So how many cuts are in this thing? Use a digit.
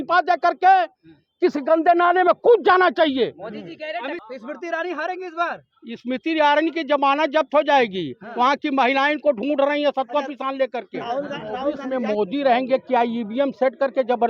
2